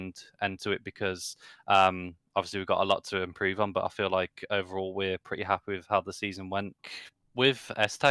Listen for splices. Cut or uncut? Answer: cut